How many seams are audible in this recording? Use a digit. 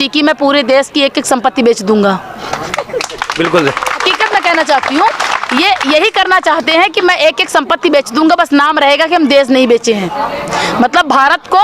0